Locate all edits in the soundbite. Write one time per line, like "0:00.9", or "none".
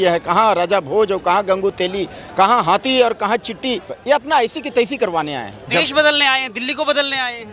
0:03.9
0:05.7